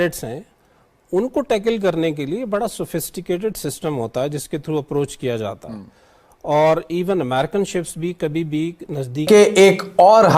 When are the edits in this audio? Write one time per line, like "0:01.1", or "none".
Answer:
0:09.2